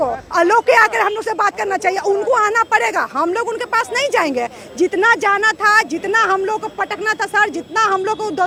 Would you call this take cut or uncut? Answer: uncut